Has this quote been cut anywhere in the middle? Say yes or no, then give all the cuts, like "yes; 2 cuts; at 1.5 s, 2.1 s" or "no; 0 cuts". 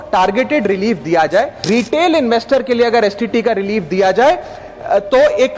yes; 1 cut; at 1.6 s